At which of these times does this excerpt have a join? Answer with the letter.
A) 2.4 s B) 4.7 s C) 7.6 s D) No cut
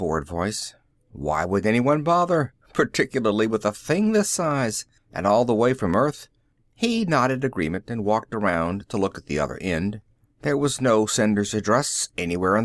B